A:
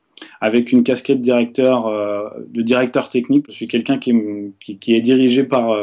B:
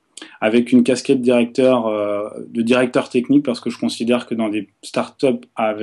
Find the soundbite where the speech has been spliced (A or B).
A